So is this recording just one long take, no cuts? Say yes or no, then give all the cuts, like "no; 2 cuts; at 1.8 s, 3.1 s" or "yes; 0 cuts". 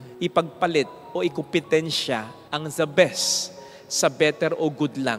yes; 0 cuts